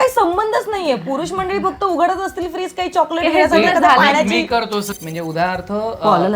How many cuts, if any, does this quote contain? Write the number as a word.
one